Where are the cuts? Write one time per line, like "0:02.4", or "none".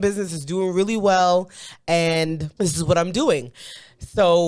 0:02.5